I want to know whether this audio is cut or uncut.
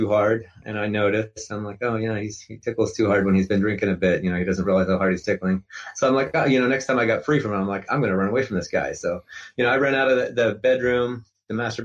uncut